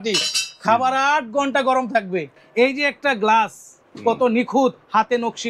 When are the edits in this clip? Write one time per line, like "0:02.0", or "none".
0:02.3